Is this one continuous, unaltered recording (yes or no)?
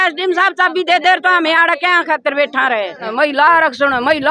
no